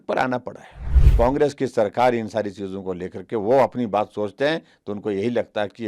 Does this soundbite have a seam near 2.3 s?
no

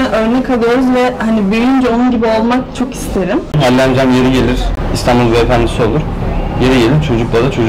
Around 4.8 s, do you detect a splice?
yes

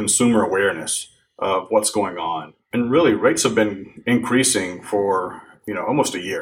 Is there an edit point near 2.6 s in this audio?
yes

